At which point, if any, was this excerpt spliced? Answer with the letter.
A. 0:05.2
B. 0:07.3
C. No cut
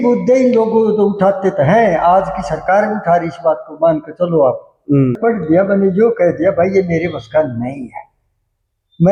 A